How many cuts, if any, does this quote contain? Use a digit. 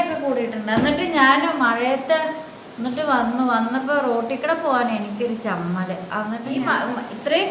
1